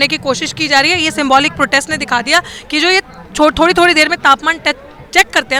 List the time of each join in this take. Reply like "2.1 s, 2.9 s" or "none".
none